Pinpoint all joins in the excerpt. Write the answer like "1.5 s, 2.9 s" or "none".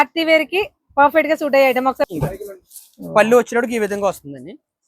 2.0 s